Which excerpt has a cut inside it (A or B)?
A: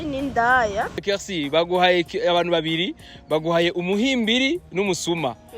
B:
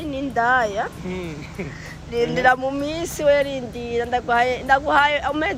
A